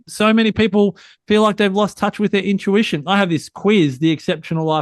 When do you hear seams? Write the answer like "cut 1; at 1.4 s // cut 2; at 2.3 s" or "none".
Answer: none